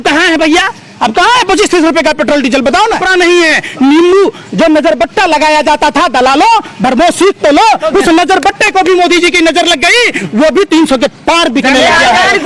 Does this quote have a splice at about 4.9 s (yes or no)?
no